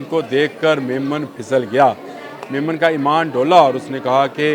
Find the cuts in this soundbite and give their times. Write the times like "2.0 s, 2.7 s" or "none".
none